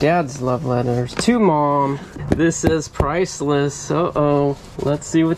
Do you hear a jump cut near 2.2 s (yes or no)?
yes